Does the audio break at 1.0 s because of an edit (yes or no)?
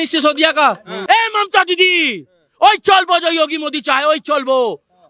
yes